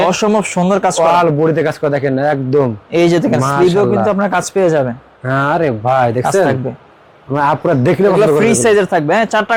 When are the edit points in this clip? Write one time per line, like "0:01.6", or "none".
none